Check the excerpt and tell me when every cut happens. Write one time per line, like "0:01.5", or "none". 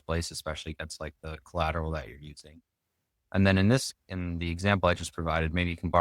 none